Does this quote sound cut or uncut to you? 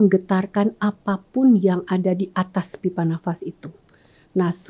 uncut